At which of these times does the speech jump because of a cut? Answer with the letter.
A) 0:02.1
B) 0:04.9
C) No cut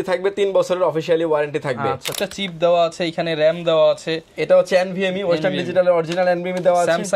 A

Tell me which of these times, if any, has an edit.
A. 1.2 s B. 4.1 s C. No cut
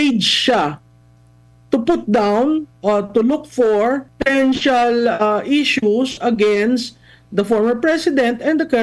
B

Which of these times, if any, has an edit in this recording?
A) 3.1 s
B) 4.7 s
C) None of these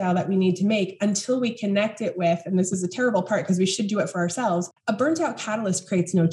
B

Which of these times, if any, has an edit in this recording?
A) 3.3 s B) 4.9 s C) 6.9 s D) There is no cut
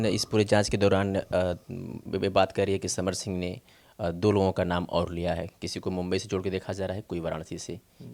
D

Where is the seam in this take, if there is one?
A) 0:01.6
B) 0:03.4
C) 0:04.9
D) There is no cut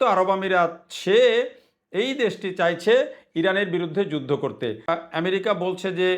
C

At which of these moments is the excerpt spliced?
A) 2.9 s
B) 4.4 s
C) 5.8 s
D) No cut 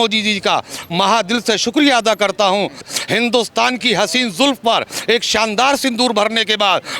A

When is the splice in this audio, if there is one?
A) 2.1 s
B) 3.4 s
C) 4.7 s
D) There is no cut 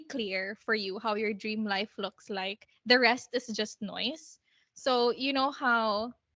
D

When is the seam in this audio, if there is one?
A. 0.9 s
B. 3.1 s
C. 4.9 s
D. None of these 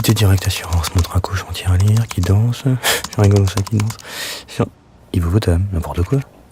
C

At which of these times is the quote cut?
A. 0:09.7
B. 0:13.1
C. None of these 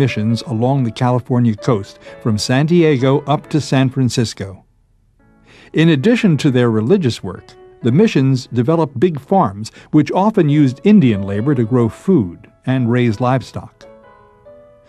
A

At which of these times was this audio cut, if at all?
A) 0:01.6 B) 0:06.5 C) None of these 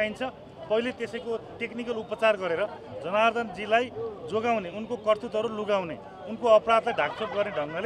C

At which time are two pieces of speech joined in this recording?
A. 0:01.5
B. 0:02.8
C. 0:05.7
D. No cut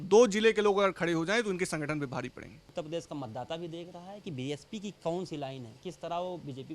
B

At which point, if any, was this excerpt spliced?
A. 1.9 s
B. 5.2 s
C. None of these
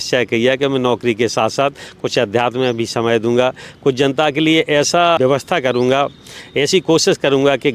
B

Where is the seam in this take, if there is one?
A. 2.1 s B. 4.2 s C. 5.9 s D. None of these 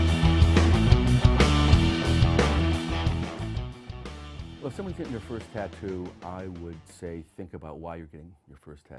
C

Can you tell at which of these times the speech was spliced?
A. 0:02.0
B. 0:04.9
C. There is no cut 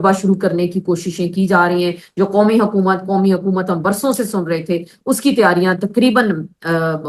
C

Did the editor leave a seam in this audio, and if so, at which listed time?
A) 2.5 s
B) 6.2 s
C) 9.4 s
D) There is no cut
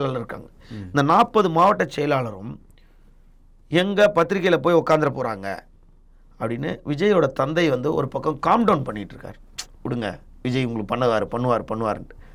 D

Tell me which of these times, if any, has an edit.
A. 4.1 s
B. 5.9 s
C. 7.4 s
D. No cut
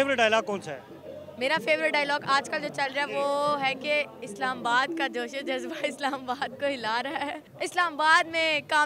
C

